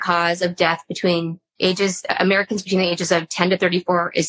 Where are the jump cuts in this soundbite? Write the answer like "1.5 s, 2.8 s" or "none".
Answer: 1.4 s